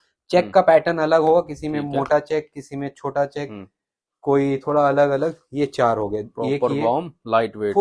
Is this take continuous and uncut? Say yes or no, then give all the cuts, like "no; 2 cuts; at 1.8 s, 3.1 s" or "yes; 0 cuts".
yes; 0 cuts